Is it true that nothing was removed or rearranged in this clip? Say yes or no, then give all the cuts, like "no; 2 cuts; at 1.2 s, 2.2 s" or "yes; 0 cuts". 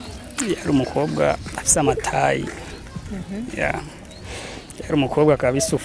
yes; 0 cuts